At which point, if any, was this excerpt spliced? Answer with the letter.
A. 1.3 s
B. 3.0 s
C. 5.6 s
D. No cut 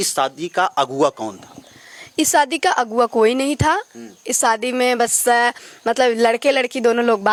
D